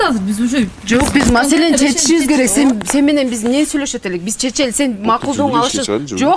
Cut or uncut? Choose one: uncut